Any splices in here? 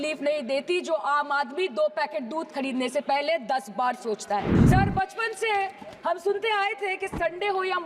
yes; 1 cut; at 4.6 s

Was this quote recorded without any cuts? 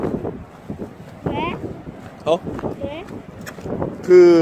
yes; 0 cuts

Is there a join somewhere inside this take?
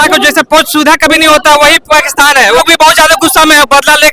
yes; 1 cut; at 2.6 s

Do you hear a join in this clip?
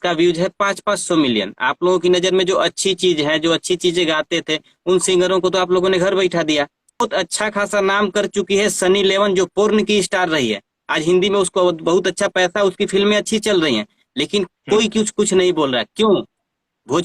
yes; 1 cut; at 7.0 s

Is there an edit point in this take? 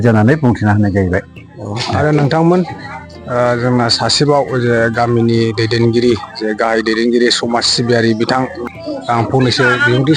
no; 0 cuts

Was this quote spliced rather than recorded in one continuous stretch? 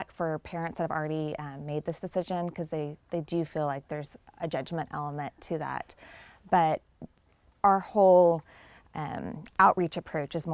no; 0 cuts

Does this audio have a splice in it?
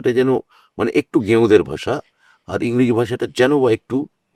no; 0 cuts

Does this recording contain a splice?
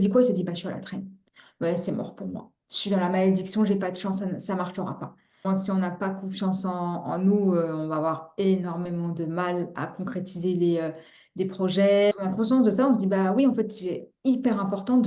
yes; 2 cuts; at 5.4 s, 12.1 s

